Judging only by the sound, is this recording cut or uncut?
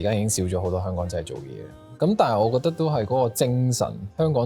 cut